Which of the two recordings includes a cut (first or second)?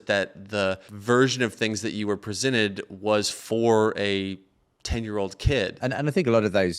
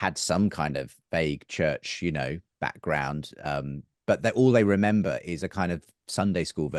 first